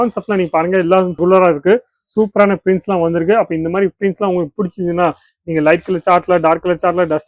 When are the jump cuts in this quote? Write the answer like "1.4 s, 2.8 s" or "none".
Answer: none